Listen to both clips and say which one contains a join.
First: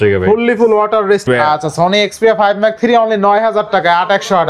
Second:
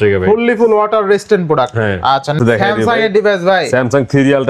first; 1 cut; at 1.3 s

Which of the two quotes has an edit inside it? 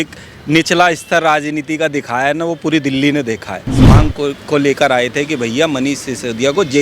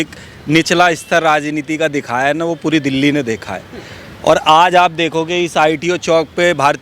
first; 1 cut; at 3.8 s

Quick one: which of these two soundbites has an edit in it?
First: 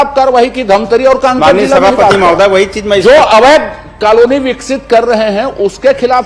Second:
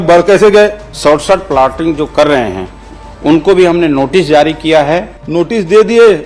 second; 2 cuts; at 0.9 s, 5.2 s

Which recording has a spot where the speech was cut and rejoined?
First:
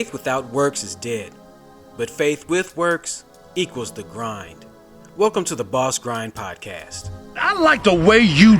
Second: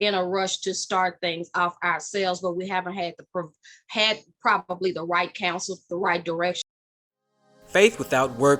second; 1 cut; at 6.6 s

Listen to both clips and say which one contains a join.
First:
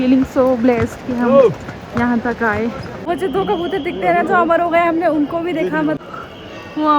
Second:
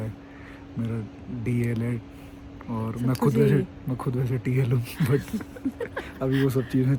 first; 2 cuts; at 3.1 s, 6.0 s

